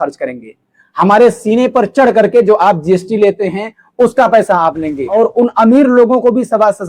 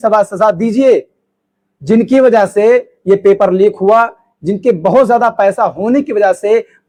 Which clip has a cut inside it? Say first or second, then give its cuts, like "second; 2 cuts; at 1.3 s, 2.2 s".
first; 1 cut; at 5.0 s